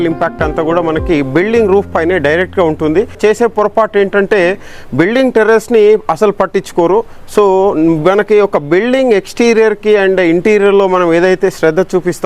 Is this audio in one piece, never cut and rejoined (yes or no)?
no